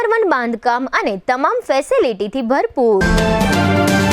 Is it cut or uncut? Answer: cut